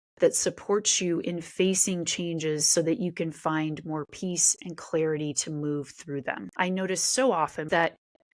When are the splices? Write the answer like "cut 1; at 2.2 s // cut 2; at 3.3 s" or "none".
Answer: cut 1; at 6.5 s // cut 2; at 7.7 s